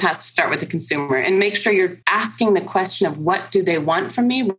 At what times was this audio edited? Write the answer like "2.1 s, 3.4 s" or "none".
2.0 s